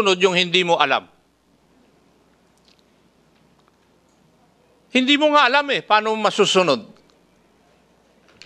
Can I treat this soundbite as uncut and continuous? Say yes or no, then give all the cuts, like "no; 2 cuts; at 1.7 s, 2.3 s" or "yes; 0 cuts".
yes; 0 cuts